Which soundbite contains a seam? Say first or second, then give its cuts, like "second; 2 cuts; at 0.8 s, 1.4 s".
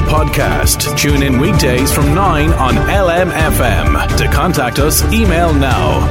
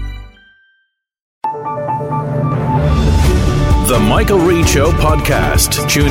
second; 1 cut; at 1.3 s